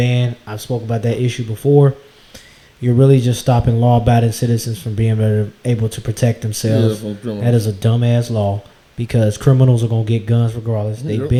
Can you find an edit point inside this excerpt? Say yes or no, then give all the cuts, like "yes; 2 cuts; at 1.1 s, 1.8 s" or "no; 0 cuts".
no; 0 cuts